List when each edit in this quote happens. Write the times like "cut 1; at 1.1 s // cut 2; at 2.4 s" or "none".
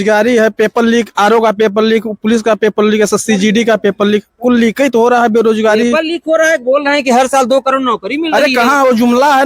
none